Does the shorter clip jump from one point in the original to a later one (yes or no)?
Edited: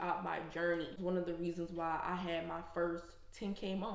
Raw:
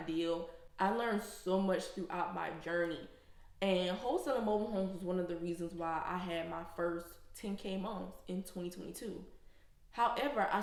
yes